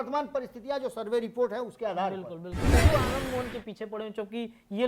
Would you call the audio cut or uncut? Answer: cut